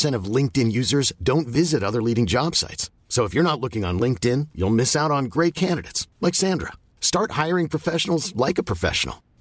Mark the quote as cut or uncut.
uncut